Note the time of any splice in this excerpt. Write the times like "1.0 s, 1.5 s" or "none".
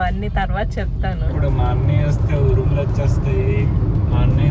1.3 s